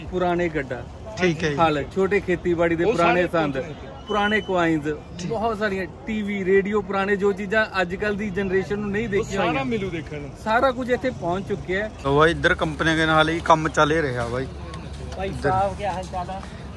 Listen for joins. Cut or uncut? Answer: cut